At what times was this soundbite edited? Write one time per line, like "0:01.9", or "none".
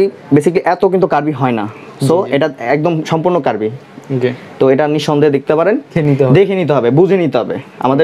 0:05.9

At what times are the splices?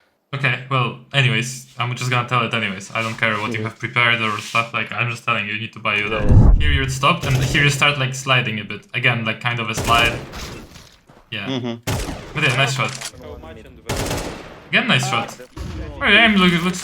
0:06.5
0:13.1

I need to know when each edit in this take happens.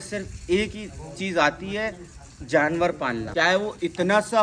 0:03.3

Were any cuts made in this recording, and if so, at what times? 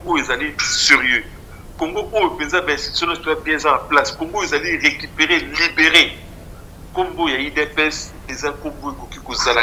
none

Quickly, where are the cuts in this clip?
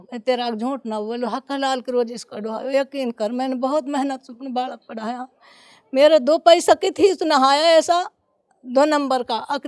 none

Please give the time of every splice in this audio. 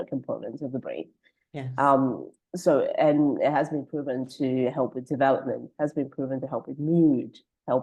none

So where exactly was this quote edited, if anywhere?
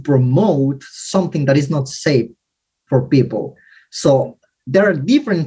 0:04.6

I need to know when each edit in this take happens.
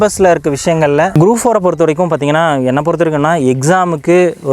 0:01.1

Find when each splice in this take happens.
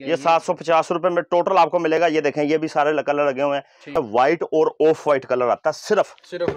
0:03.9

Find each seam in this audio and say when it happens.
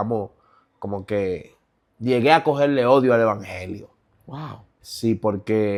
none

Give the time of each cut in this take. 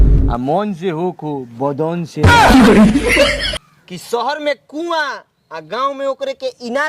0:02.2
0:04.0

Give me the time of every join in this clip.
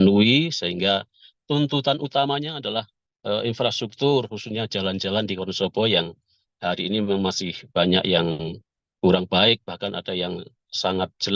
none

